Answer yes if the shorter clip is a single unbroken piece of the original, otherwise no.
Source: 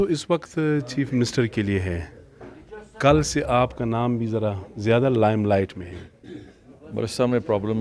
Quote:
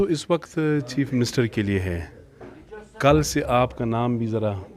yes